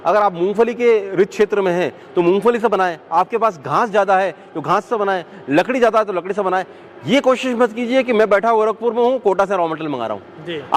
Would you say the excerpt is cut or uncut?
uncut